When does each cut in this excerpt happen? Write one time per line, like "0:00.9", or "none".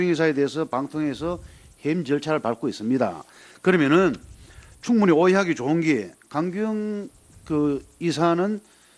0:04.0